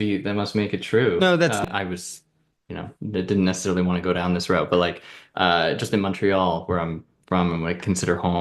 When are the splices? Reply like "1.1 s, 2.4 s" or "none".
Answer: 1.6 s